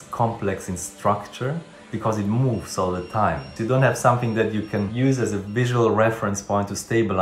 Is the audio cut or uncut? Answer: cut